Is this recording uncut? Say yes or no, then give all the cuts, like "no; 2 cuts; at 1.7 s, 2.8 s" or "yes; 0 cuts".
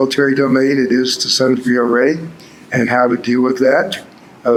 yes; 0 cuts